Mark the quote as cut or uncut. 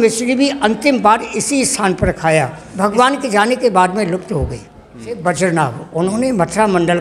cut